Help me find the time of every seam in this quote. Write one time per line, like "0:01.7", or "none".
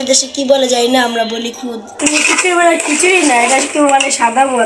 0:01.9